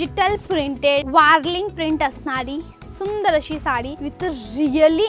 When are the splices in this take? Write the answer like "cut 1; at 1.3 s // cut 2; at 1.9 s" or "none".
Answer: cut 1; at 1.1 s // cut 2; at 4.0 s